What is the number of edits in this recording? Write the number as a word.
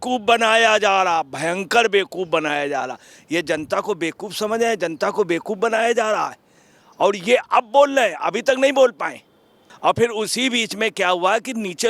one